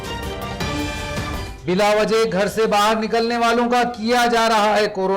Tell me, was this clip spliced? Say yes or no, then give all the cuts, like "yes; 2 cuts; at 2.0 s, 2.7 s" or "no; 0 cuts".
yes; 1 cut; at 1.4 s